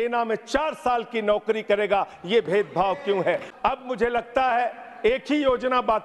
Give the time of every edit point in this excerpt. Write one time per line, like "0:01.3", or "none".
0:03.5